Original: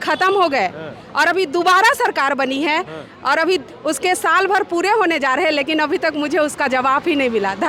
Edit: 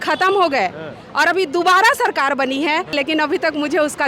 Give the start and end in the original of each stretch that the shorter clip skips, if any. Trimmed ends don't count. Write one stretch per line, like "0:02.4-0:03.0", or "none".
0:02.9-0:05.5